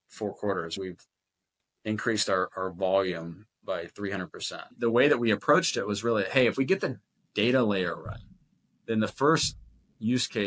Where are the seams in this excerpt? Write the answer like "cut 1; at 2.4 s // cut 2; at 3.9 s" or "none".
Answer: cut 1; at 4.7 s